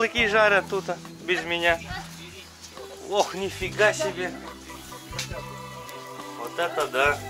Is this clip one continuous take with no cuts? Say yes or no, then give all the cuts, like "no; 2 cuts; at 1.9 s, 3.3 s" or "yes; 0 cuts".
yes; 0 cuts